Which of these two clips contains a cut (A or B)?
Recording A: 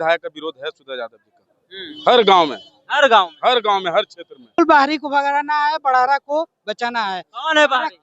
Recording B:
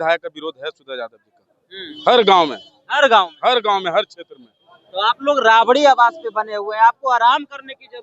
A